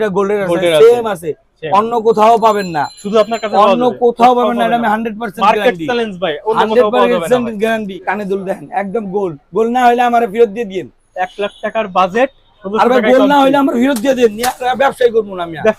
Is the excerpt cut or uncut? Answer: cut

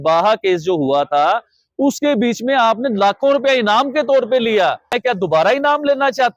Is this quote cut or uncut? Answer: cut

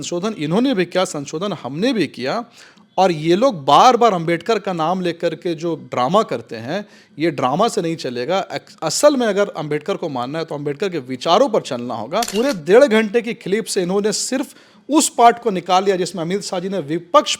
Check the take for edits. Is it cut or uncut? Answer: cut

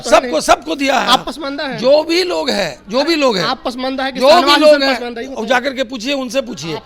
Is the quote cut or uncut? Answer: uncut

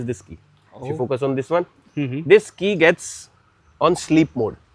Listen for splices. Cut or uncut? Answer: uncut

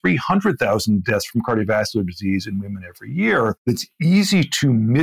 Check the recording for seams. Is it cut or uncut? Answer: cut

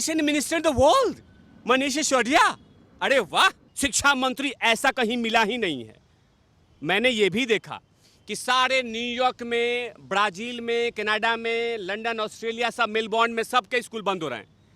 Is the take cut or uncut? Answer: cut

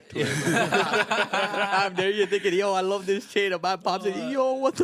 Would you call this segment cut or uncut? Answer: uncut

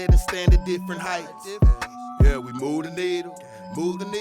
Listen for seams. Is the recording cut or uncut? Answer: cut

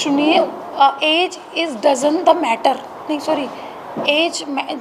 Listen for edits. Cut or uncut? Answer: uncut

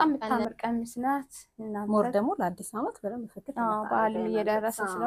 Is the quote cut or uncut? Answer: uncut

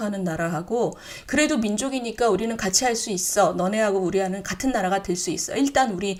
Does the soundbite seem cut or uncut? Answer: uncut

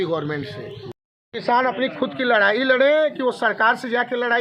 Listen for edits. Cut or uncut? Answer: cut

